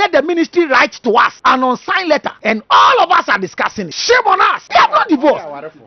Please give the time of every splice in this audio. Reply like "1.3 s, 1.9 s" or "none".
1.3 s, 2.3 s, 3.9 s, 4.6 s